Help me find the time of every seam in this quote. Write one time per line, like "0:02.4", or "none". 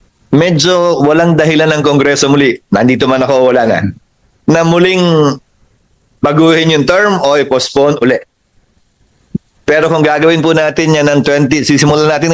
none